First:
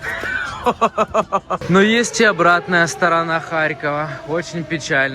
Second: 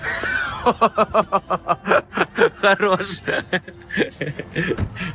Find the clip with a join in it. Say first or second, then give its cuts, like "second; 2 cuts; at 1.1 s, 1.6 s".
first; 1 cut; at 1.6 s